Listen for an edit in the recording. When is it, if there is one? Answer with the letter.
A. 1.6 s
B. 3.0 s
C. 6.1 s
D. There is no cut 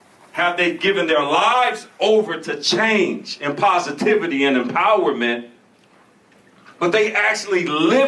D